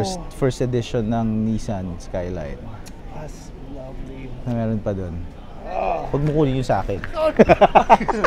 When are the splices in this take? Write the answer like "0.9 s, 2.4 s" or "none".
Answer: none